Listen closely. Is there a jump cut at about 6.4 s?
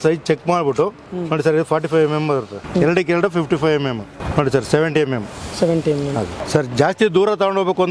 yes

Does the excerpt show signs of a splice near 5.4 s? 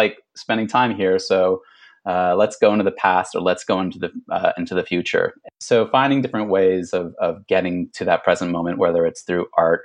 yes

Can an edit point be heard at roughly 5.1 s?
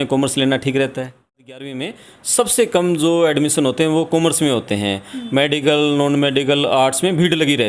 no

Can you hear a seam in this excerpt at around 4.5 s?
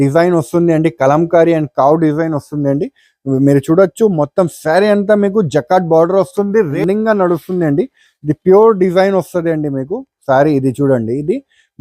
no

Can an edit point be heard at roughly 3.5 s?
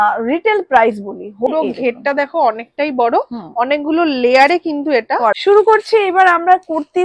no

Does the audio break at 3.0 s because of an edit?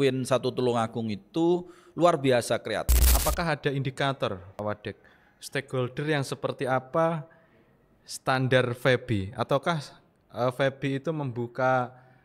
yes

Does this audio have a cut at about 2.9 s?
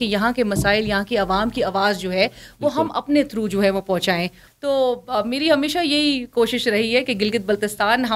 no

